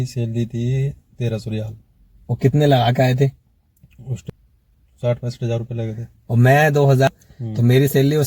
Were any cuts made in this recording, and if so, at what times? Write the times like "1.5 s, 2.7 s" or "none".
4.2 s, 7.1 s